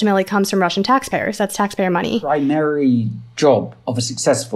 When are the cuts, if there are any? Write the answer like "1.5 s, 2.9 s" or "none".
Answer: 2.2 s